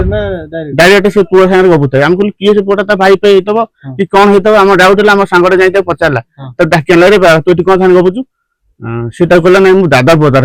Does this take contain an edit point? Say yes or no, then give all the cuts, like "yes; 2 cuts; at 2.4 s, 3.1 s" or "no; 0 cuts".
no; 0 cuts